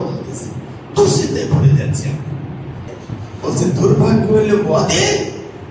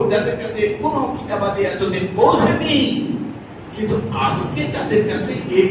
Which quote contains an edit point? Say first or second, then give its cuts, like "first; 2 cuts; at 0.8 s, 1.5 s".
first; 1 cut; at 2.9 s